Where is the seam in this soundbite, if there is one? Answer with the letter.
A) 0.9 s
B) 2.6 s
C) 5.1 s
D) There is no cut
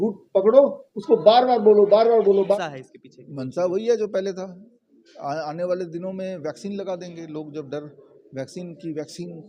B